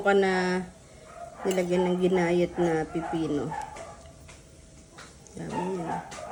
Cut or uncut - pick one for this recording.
uncut